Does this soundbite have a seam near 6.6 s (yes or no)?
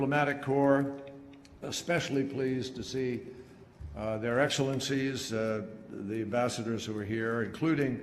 yes